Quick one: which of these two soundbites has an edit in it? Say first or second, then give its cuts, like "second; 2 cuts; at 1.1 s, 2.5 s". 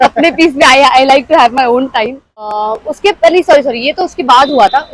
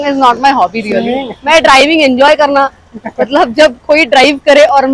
first; 1 cut; at 2.5 s